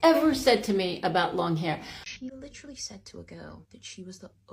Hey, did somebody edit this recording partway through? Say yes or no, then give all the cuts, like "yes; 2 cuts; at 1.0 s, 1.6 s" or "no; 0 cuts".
yes; 1 cut; at 2.0 s